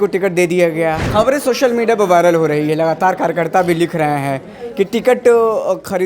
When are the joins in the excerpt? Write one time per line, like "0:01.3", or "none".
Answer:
0:01.0